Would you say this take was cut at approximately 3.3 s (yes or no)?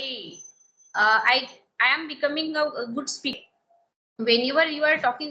yes